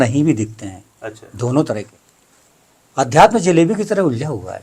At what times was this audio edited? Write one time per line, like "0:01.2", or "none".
0:01.9